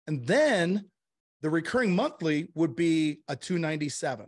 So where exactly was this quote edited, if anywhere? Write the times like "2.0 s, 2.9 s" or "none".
none